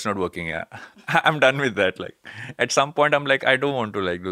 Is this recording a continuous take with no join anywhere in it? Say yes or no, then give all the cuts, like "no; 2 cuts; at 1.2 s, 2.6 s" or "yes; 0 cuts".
yes; 0 cuts